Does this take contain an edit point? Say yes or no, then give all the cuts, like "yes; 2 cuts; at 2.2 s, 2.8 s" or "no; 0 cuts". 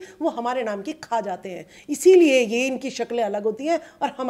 no; 0 cuts